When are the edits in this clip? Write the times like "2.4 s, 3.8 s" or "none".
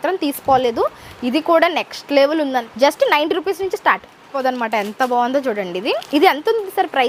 2.7 s, 4.4 s